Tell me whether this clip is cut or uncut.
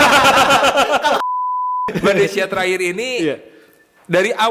cut